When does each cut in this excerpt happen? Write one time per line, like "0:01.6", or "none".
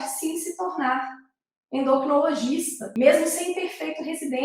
0:02.9